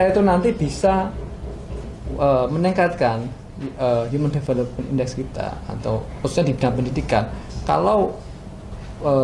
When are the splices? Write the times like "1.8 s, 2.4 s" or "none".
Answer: none

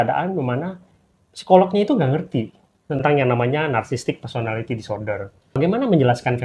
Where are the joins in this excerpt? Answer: 5.6 s

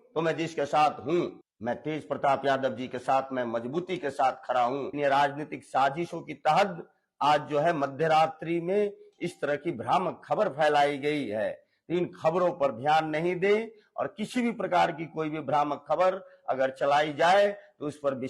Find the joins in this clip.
1.5 s, 4.9 s

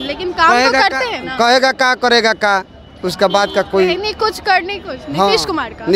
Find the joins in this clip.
none

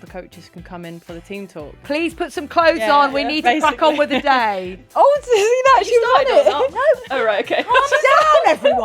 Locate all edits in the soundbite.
1.8 s, 4.8 s

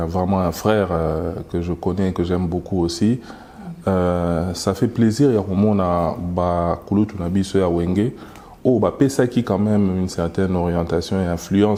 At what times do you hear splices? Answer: none

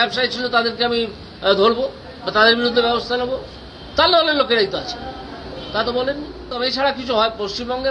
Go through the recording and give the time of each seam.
6.5 s

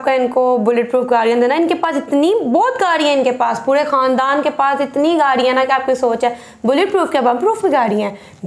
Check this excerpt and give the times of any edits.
none

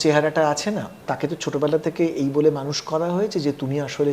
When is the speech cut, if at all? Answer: 1.0 s

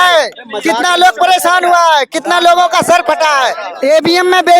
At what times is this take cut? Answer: 3.7 s

